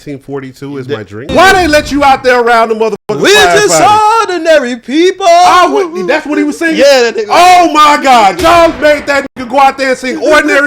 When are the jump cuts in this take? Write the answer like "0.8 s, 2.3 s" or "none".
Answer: 1.2 s